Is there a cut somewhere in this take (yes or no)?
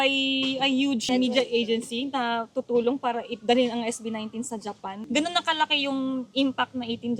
yes